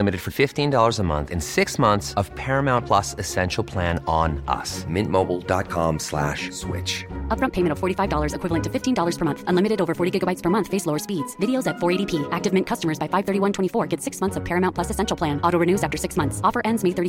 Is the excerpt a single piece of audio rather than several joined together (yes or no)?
yes